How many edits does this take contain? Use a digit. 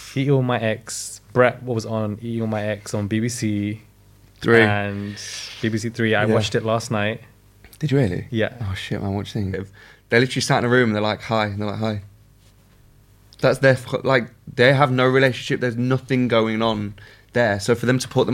1